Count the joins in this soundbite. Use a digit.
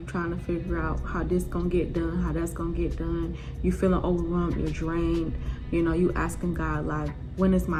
0